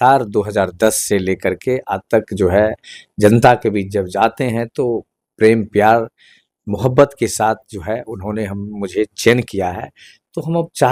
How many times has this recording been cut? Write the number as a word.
zero